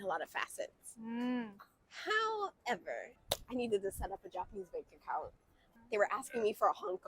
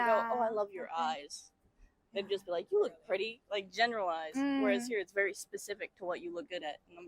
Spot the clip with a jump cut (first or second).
first